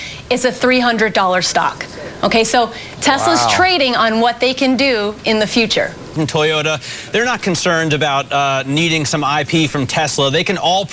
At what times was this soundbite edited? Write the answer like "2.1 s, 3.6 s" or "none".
6.1 s